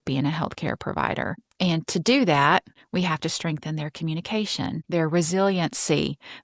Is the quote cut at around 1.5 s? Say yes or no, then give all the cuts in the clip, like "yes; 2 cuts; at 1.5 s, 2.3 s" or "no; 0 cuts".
yes; 3 cuts; at 1.5 s, 2.8 s, 4.8 s